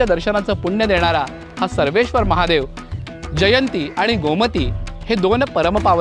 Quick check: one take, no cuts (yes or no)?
no